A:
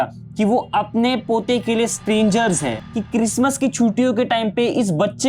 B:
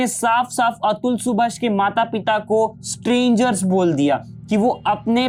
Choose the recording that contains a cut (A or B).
A